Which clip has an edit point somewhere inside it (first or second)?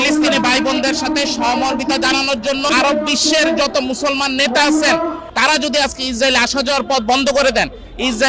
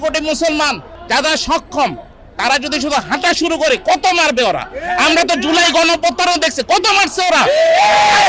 first